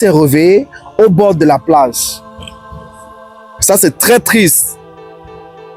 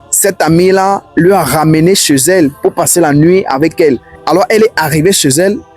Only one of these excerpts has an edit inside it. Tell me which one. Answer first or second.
second